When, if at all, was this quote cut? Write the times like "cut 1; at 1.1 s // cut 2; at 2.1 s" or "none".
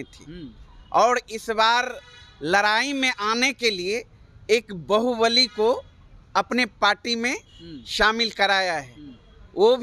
none